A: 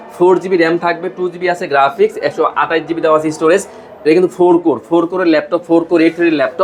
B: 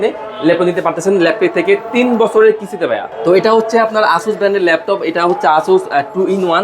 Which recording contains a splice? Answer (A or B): B